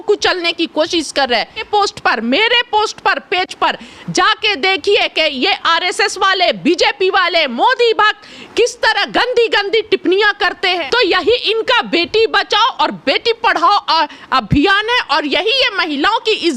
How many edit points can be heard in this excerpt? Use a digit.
2